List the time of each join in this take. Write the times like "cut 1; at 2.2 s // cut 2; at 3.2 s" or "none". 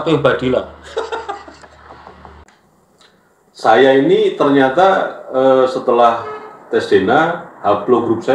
cut 1; at 2.4 s